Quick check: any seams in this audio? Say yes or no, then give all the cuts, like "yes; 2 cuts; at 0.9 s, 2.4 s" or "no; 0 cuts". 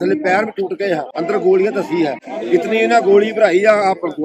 yes; 2 cuts; at 1.1 s, 2.3 s